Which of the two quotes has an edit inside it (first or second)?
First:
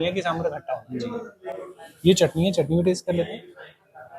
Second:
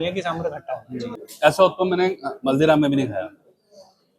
second